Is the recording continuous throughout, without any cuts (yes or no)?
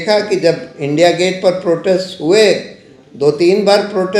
yes